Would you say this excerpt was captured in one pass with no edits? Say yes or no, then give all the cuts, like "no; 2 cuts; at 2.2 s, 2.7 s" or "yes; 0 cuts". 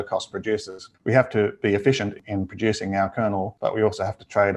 no; 3 cuts; at 0.9 s, 2.2 s, 3.5 s